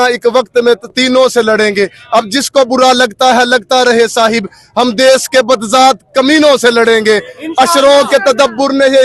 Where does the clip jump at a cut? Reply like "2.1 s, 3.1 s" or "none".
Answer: none

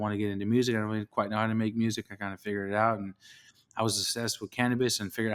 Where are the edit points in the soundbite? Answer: none

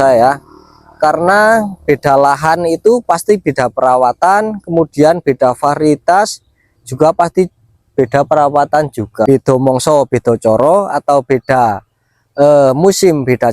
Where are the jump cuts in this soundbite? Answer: 9.2 s

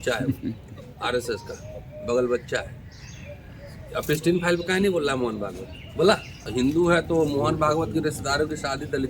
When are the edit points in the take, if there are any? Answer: 6.3 s

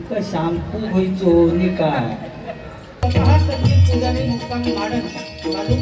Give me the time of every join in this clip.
3.0 s

